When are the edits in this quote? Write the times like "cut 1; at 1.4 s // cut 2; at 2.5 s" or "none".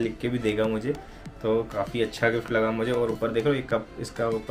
none